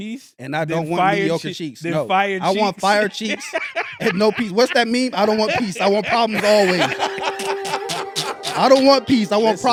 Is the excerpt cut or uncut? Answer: uncut